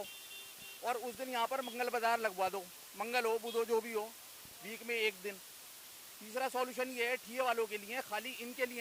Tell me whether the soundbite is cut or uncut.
uncut